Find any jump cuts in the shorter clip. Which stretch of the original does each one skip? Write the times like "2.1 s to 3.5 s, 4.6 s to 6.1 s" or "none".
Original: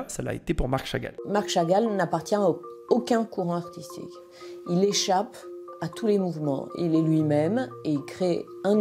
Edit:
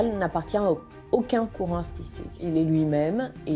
4.1 s to 6.7 s

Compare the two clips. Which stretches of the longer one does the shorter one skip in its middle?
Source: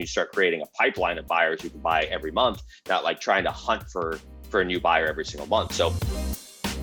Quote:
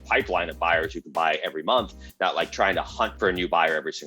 3.8 s to 4.5 s

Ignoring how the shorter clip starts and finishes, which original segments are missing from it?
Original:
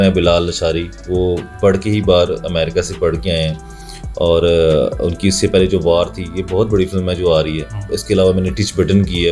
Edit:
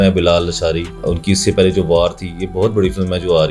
1.0 s to 5.0 s

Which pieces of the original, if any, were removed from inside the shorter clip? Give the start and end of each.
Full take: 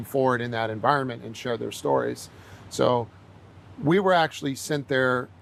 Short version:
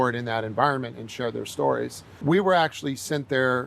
2.3 s to 3.6 s

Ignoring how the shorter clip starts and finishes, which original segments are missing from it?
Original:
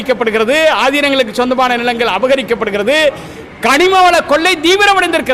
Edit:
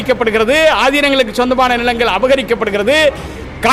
none

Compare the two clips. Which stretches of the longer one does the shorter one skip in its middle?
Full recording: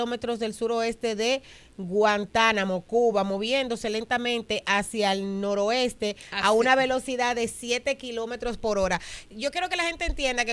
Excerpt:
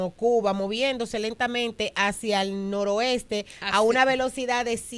none

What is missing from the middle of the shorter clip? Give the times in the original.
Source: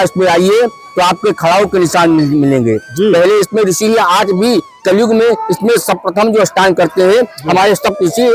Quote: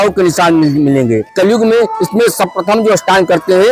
2.8 s to 4.8 s

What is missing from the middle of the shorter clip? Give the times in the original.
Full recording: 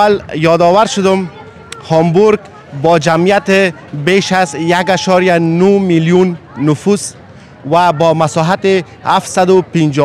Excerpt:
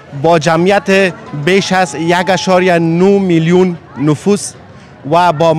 none

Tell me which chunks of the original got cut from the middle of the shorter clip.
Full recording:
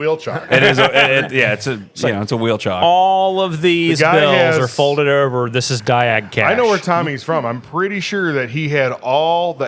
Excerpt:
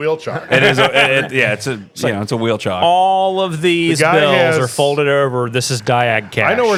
none

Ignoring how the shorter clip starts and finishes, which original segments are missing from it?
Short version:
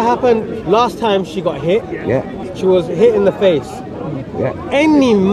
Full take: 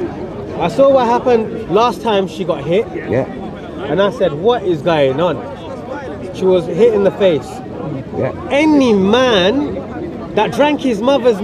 3.5 s to 6.2 s

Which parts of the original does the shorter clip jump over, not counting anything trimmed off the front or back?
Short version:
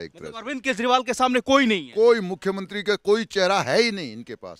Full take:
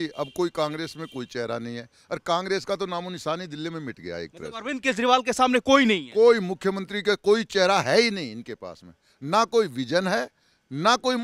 none

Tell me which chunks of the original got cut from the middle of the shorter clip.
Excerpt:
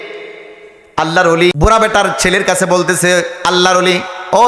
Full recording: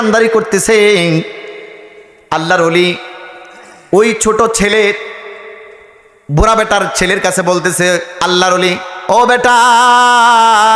2.9 s to 6.3 s

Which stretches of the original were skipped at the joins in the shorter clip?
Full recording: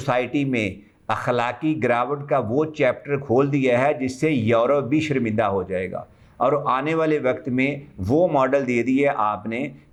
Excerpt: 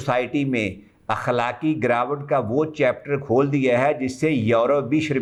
none

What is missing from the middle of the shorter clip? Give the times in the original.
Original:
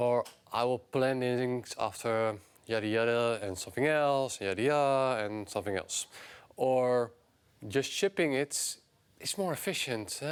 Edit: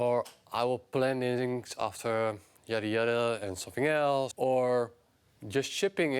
4.3 s to 6.5 s

